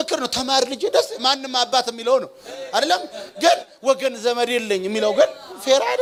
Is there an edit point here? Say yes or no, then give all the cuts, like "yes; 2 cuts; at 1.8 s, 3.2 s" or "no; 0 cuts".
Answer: no; 0 cuts